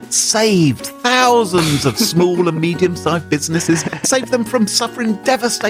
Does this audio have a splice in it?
yes; 1 cut; at 3.9 s

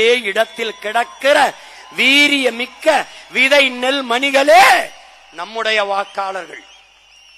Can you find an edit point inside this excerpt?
no; 0 cuts

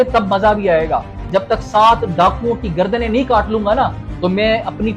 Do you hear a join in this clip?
yes; 1 cut; at 1.2 s

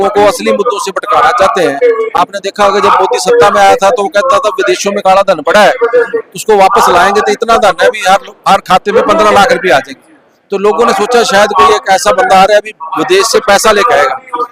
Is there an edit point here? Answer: no; 0 cuts

